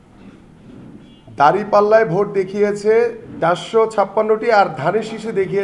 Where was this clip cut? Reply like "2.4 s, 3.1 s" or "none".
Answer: 3.2 s

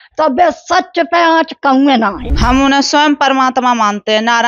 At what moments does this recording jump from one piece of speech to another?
2.3 s

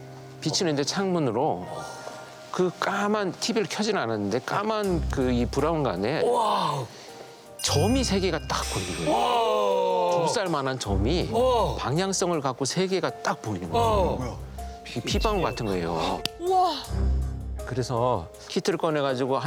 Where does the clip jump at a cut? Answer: none

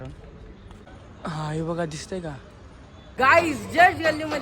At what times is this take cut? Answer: 3.2 s

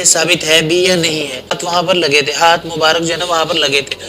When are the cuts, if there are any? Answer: 1.6 s

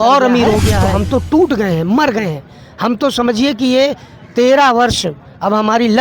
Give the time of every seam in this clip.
0.9 s

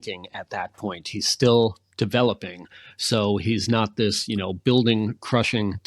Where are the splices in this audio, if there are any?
none

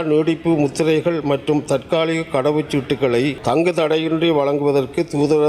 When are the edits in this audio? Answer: 3.4 s

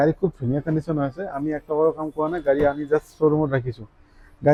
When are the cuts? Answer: none

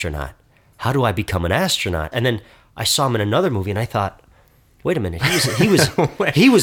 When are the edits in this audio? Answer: 2.1 s

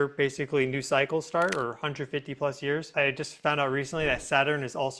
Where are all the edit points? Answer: 2.9 s

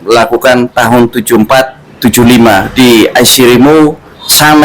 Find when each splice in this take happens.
none

